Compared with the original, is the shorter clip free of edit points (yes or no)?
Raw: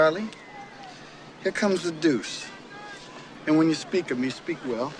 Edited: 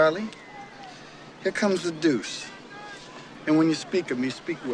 yes